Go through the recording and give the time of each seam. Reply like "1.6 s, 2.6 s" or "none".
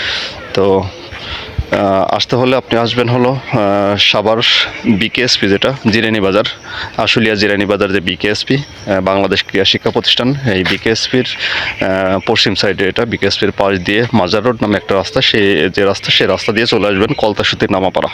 none